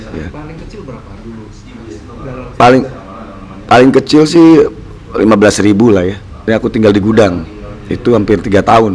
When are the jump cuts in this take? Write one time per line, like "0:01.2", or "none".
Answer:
0:06.5